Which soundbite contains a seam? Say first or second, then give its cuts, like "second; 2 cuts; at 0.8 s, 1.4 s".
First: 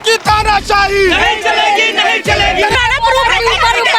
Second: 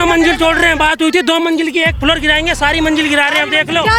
first; 1 cut; at 2.8 s